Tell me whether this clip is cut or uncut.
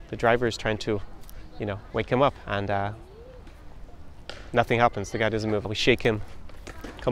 cut